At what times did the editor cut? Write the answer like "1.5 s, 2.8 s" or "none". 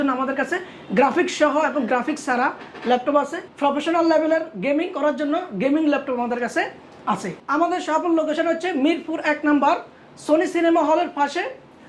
3.4 s, 7.3 s